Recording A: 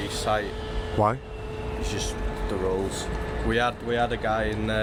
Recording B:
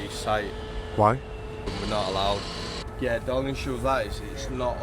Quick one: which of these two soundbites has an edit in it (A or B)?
B